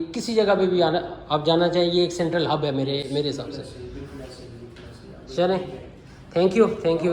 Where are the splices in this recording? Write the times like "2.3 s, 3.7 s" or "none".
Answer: none